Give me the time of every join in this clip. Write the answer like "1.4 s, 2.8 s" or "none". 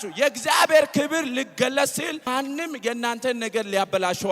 2.3 s